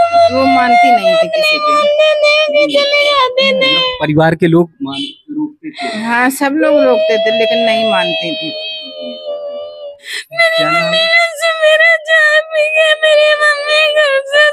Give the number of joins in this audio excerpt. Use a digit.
1